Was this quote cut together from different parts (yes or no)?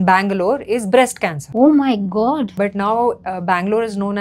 yes